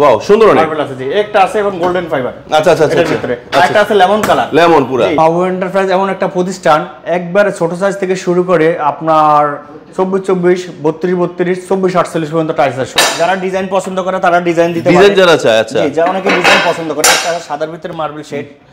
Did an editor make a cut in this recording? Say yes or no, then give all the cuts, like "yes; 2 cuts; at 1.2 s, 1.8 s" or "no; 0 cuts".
yes; 2 cuts; at 5.2 s, 12.9 s